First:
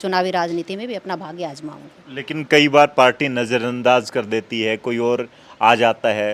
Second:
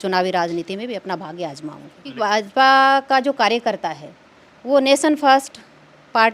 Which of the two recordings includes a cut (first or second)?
second